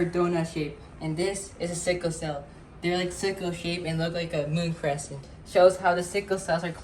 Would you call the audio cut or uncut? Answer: cut